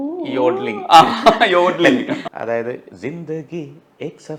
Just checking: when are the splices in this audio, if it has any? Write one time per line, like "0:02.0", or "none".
0:02.1